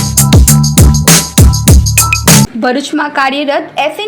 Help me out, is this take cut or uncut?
cut